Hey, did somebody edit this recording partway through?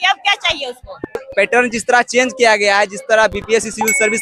yes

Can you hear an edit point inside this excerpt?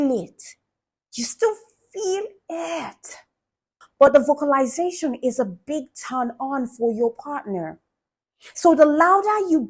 yes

